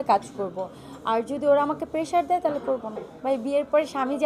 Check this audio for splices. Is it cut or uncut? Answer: cut